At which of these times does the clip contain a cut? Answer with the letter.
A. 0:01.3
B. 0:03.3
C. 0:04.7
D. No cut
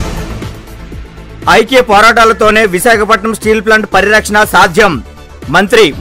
A